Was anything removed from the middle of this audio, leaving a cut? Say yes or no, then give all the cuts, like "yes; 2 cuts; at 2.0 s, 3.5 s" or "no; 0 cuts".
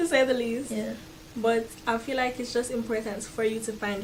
no; 0 cuts